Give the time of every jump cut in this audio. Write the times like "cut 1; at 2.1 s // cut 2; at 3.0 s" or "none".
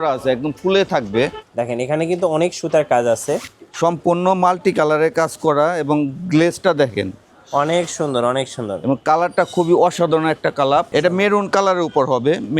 cut 1; at 1.4 s // cut 2; at 10.9 s